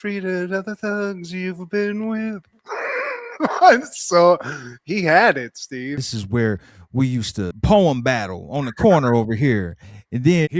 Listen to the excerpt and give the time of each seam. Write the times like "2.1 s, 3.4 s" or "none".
6.1 s